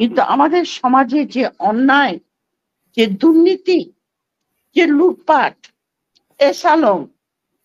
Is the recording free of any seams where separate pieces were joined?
yes; 0 cuts

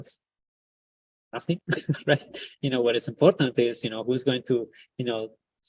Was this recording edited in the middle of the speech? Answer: no; 0 cuts

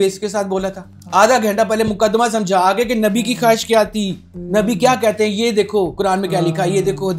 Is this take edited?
no; 0 cuts

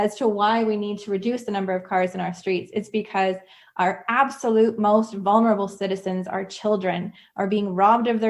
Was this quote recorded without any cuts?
yes; 0 cuts

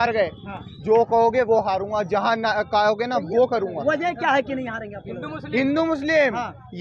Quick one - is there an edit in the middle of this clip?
no; 0 cuts

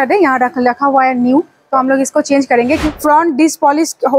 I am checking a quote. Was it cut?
yes; 1 cut; at 2.9 s

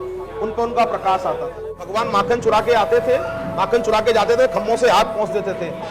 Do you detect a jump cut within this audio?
yes; 1 cut; at 1.9 s

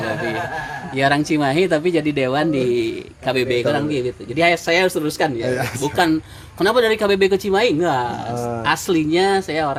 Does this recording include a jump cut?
no; 0 cuts

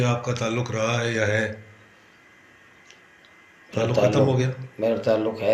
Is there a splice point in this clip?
no; 0 cuts

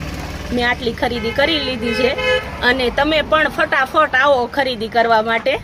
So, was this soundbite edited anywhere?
no; 0 cuts

